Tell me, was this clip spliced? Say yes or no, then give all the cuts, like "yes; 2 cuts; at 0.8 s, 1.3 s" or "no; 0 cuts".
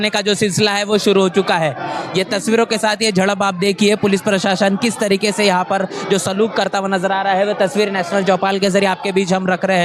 no; 0 cuts